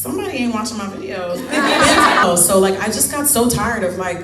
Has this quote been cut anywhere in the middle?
yes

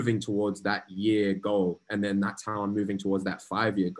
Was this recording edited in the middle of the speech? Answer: no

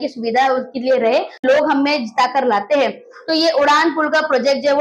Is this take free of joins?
no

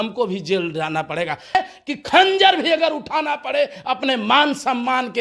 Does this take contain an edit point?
yes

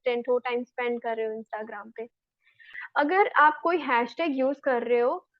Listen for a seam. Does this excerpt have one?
yes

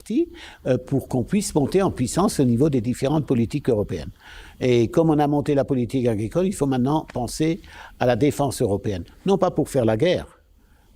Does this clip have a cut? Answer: no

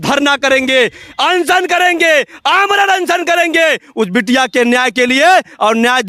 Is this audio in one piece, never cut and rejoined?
yes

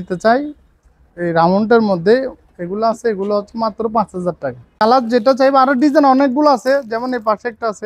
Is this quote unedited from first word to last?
no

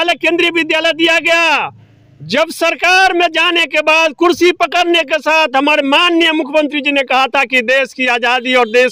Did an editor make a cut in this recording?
no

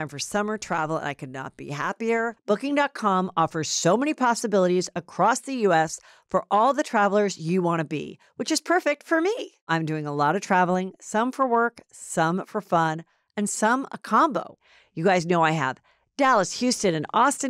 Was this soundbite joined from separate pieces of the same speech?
no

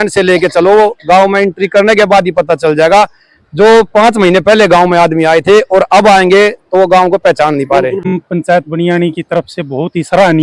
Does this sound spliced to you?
yes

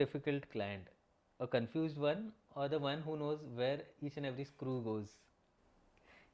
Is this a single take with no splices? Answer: yes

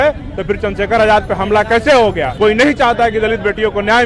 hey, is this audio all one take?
no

